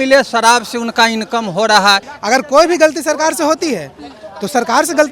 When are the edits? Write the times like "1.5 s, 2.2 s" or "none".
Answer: 2.1 s